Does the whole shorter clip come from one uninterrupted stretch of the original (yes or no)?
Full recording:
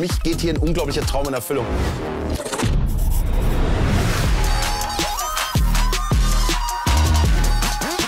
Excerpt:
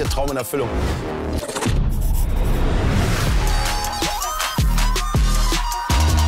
yes